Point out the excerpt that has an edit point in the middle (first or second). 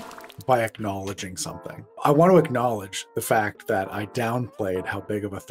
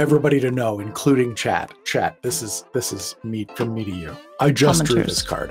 first